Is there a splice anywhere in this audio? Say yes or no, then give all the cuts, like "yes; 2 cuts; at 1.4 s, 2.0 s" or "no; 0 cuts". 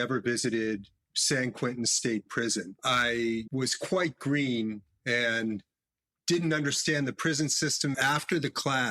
yes; 3 cuts; at 2.7 s, 3.5 s, 8.0 s